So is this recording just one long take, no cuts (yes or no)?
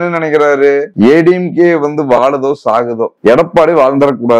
yes